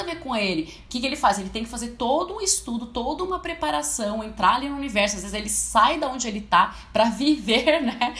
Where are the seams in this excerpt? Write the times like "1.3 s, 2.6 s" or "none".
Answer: none